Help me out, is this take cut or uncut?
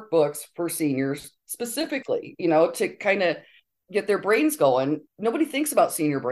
cut